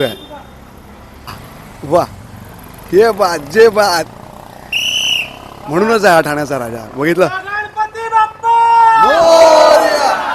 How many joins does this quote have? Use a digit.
1